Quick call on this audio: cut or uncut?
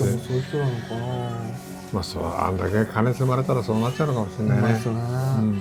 uncut